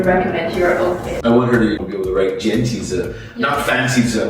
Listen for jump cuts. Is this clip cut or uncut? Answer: cut